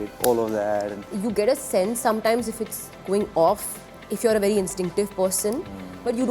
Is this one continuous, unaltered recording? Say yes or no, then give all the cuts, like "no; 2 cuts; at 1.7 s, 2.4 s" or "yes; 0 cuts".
no; 1 cut; at 1.0 s